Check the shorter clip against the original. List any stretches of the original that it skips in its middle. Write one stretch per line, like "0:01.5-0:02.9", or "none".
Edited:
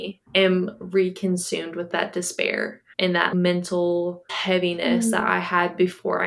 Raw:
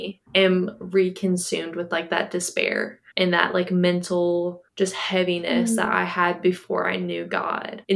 0:01.9-0:02.0
0:03.5-0:03.7
0:04.7-0:05.0